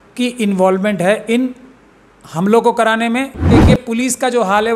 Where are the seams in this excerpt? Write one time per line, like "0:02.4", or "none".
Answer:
0:03.6